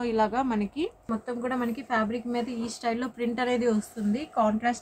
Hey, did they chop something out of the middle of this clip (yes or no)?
yes